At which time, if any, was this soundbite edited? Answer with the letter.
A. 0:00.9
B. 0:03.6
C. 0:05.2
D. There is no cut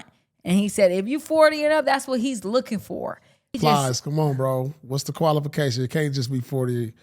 B